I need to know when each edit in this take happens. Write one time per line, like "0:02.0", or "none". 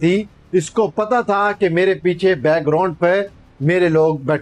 none